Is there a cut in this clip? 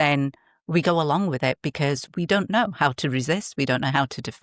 no; 0 cuts

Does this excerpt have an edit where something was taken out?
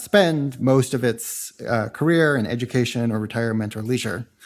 no; 0 cuts

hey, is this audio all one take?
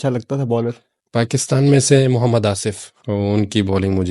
no; 2 cuts; at 0.9 s, 2.9 s

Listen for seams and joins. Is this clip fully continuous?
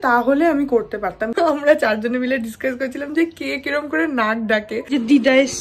no; 2 cuts; at 1.3 s, 4.9 s

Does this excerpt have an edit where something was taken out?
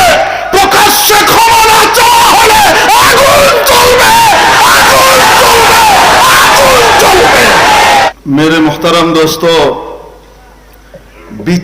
yes; 1 cut; at 7.9 s

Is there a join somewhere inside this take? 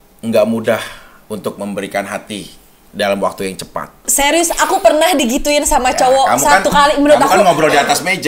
yes; 1 cut; at 4.1 s

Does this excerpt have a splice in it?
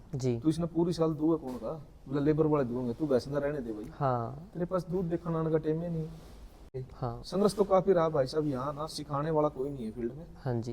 yes; 1 cut; at 6.7 s

